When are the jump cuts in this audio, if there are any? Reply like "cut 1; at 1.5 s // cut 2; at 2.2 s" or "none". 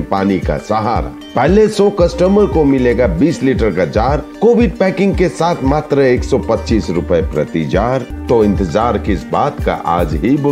cut 1; at 8.1 s

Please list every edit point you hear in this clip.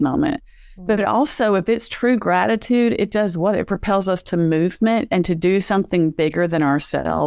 none

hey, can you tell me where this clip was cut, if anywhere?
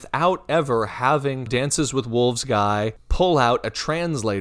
cut 1; at 1.5 s // cut 2; at 3.0 s

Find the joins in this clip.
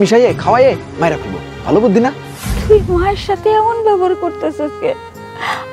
cut 1; at 2.5 s

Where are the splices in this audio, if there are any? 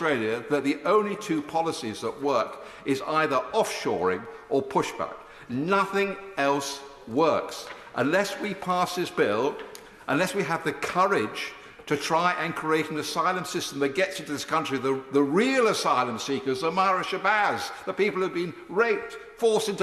none

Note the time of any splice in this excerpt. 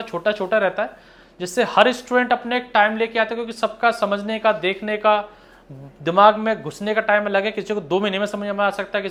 none

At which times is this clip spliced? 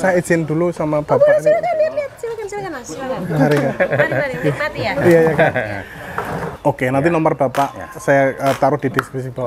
cut 1; at 6.5 s

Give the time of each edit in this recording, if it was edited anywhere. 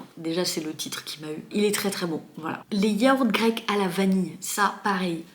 none

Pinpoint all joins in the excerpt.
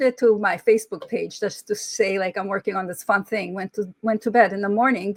none

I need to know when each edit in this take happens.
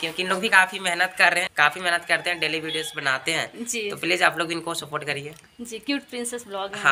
cut 1; at 1.5 s

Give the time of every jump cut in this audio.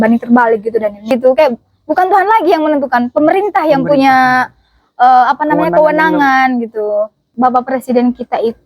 cut 1; at 1.1 s // cut 2; at 7.3 s

